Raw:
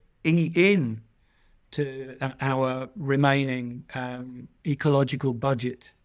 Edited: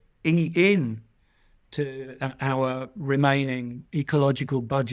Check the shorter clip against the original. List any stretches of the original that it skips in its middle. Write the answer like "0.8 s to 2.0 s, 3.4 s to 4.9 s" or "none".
3.8 s to 4.5 s